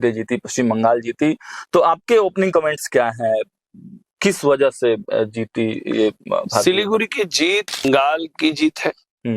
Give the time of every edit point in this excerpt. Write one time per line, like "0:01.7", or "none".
0:07.8

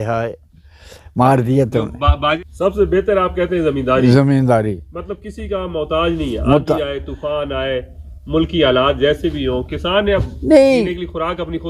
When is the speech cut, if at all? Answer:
0:02.4

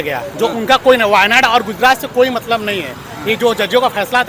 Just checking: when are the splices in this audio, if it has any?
none

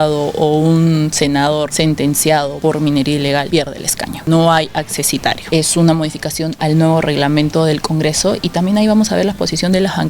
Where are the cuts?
0:01.7
0:02.5
0:03.6
0:05.5

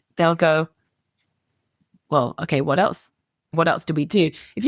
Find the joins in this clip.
0:03.5

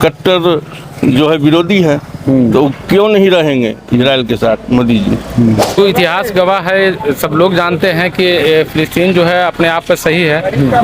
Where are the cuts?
0:05.8

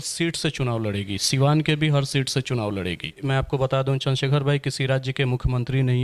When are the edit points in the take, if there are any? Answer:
0:03.1

